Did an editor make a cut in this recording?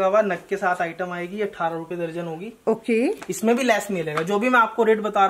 no; 0 cuts

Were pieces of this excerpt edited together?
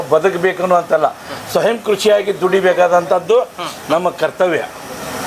no; 0 cuts

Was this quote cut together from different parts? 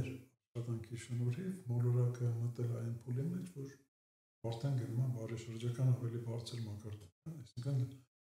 no; 0 cuts

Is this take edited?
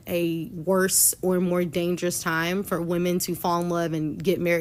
no; 0 cuts

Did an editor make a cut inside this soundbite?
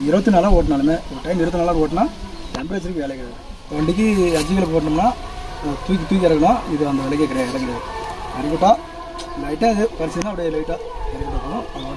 yes; 1 cut; at 3.8 s

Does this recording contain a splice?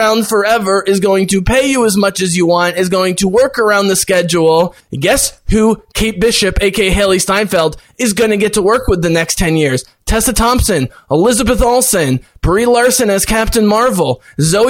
yes; 1 cut; at 4.8 s

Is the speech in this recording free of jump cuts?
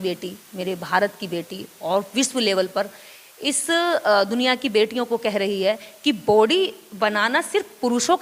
yes; 0 cuts

